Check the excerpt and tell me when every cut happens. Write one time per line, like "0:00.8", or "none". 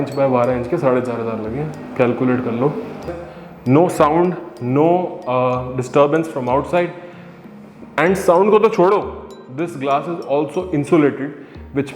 0:03.2